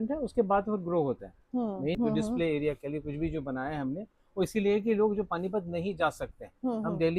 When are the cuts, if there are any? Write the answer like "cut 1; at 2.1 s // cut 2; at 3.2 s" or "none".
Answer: cut 1; at 1.9 s